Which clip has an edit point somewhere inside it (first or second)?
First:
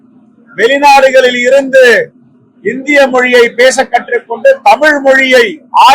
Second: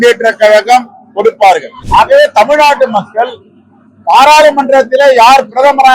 second